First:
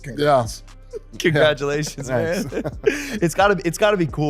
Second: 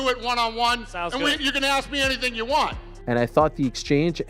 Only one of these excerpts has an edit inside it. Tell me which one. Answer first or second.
second